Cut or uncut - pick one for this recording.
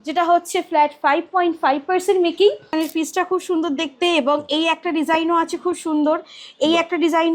cut